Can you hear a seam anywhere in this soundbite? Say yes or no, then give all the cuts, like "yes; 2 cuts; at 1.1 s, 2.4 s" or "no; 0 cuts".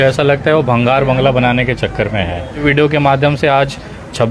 yes; 1 cut; at 2.6 s